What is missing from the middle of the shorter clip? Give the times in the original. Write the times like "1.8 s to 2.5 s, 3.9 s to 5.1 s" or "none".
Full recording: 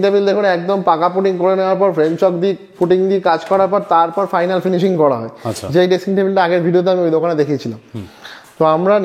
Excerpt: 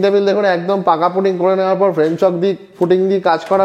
none